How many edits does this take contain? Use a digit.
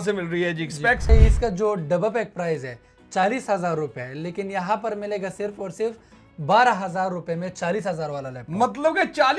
1